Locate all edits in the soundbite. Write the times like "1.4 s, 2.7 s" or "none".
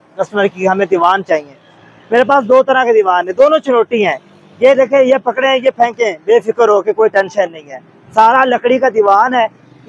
none